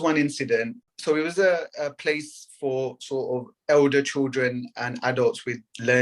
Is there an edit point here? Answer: yes; 1 cut; at 0.9 s

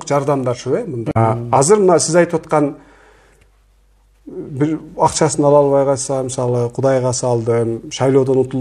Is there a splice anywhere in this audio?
yes; 1 cut; at 1.1 s

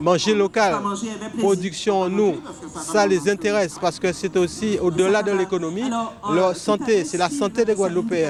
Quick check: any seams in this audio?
no; 0 cuts

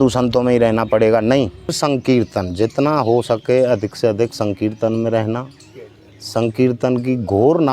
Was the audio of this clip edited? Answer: yes; 1 cut; at 1.8 s

